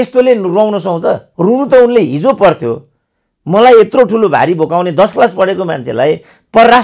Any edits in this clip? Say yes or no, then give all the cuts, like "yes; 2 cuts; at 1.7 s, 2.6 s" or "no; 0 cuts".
yes; 1 cut; at 1.3 s